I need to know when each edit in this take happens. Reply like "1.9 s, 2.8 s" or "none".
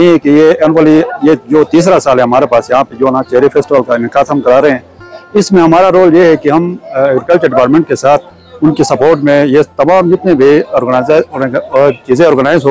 none